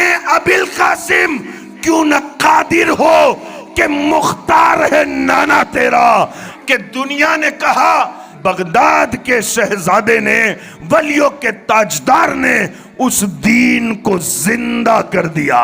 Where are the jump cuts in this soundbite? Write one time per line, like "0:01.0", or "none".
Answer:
0:06.5